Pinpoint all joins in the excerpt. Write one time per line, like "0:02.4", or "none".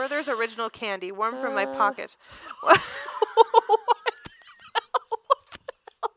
none